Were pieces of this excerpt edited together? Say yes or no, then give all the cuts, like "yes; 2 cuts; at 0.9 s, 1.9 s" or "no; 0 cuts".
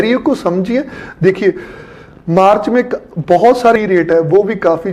yes; 1 cut; at 3.8 s